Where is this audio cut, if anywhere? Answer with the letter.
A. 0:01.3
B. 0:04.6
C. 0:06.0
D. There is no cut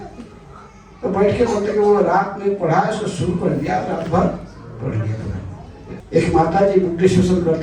C